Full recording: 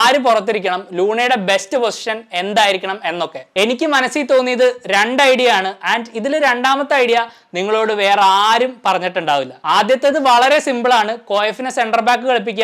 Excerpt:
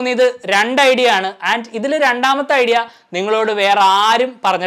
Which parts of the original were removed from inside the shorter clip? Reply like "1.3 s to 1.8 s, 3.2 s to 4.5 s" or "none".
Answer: none